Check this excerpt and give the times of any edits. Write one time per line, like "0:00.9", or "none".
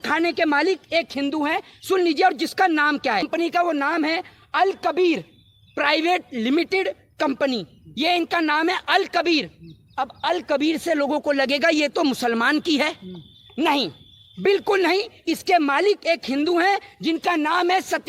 0:01.2
0:03.3